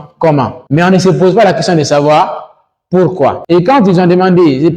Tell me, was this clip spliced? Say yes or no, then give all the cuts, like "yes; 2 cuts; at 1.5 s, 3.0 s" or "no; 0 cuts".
yes; 1 cut; at 3.4 s